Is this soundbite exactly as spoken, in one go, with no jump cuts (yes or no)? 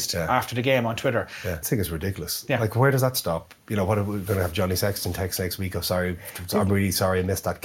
no